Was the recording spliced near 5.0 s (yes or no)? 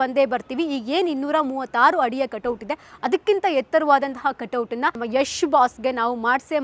yes